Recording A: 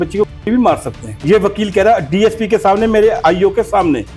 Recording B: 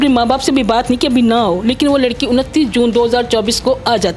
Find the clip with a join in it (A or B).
A